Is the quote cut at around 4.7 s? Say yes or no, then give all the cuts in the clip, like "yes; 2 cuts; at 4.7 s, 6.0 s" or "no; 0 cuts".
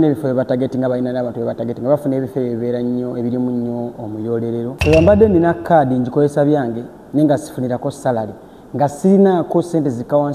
yes; 1 cut; at 4.7 s